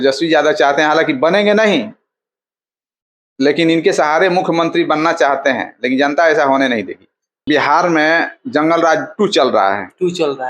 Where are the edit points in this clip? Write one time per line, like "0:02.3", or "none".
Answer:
0:07.4